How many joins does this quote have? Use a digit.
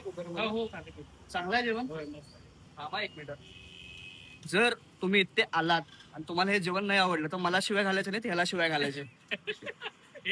0